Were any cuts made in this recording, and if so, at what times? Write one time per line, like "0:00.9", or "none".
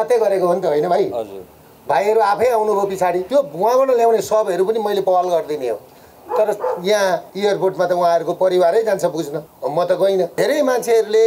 0:03.2
0:07.3
0:09.4
0:10.3